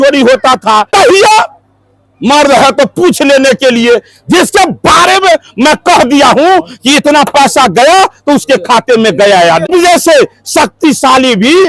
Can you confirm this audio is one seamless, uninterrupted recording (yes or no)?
no